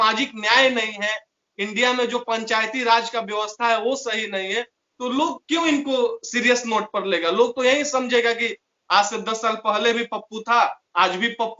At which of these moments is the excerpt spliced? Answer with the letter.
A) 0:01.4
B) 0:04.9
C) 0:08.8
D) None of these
D